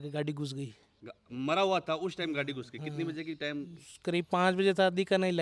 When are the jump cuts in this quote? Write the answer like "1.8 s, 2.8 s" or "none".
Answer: none